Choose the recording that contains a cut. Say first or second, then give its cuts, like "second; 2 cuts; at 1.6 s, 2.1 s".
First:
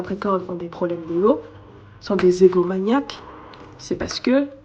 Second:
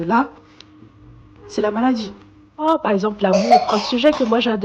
second; 1 cut; at 2.7 s